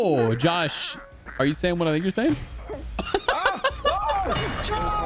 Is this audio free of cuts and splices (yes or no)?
yes